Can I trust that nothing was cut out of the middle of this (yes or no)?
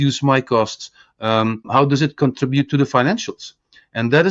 no